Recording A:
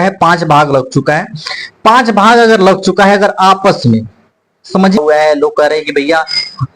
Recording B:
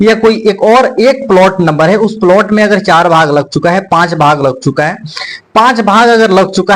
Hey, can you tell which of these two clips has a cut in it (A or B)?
A